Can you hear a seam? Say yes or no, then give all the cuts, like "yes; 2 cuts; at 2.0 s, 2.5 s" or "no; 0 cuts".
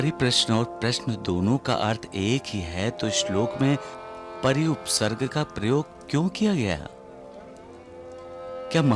no; 0 cuts